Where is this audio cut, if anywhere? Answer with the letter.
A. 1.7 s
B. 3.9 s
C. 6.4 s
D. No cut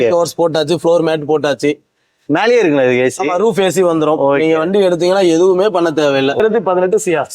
C